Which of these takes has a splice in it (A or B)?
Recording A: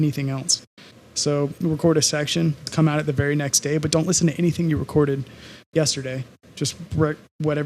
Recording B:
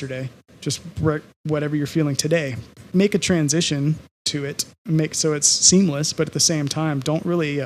A